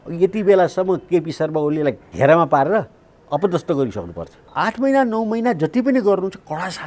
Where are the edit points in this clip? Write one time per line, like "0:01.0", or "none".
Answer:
0:02.1
0:04.5